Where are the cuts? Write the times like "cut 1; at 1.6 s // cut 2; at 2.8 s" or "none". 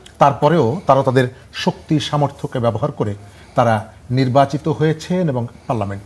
none